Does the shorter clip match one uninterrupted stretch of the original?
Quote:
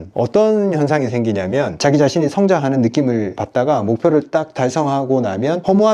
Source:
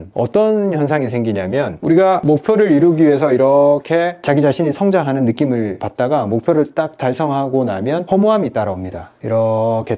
no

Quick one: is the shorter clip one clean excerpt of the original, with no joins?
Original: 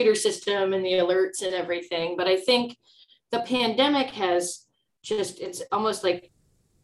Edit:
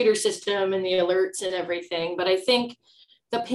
yes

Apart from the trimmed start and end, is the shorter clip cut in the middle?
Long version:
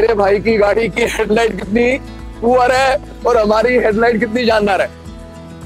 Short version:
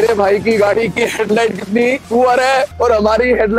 yes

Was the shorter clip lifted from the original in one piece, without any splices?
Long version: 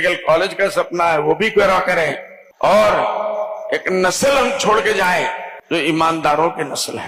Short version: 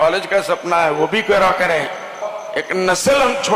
no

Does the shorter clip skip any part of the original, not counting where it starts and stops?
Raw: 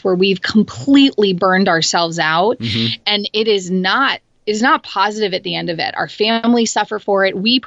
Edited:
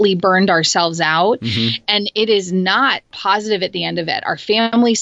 yes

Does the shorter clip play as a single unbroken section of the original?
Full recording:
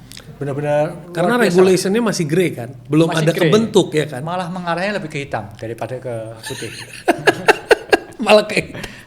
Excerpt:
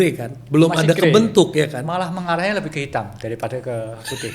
yes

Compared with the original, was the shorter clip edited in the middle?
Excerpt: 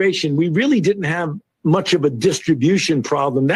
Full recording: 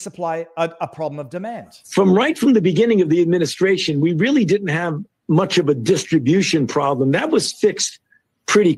no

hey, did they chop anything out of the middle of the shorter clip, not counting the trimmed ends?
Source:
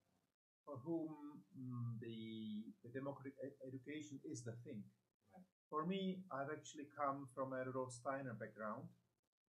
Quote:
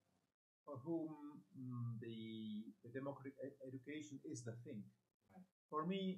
no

